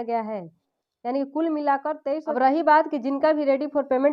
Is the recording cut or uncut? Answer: cut